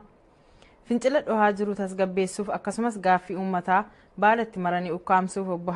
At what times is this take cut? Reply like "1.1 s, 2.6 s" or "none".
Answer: none